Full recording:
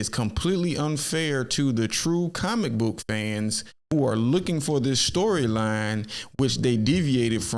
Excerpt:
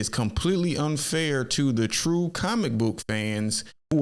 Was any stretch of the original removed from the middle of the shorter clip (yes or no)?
no